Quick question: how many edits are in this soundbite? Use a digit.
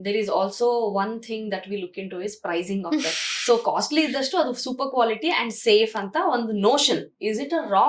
0